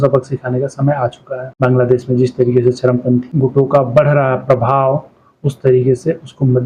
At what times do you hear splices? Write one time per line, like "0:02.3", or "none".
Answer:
none